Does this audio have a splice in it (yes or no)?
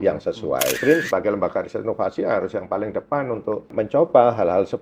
yes